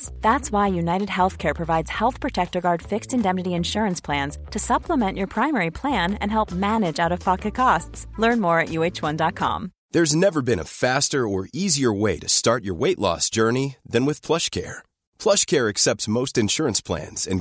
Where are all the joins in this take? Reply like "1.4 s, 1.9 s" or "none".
none